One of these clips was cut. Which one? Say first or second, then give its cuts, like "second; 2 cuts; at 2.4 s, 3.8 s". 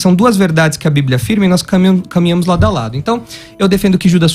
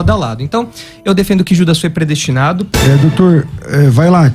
second; 1 cut; at 2.7 s